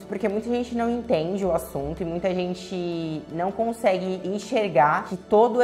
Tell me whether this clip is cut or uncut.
uncut